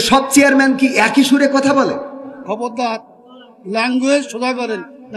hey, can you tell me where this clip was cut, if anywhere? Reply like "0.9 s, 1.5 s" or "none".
2.4 s